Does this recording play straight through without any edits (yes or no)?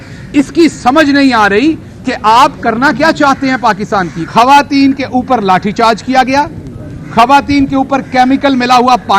no